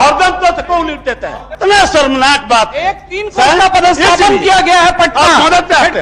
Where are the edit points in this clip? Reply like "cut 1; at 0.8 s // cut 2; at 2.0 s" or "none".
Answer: cut 1; at 1.0 s